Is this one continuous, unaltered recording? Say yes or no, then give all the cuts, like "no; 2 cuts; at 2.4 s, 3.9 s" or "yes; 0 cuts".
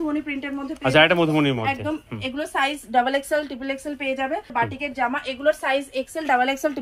no; 1 cut; at 4.5 s